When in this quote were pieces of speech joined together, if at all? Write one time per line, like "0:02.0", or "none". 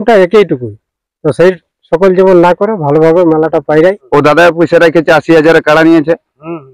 0:04.0